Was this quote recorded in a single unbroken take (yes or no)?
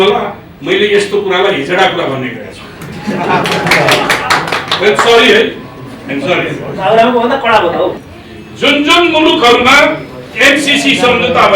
no